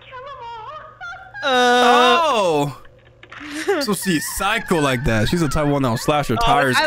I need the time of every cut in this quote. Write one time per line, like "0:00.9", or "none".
none